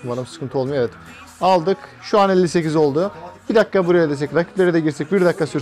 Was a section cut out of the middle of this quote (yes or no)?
no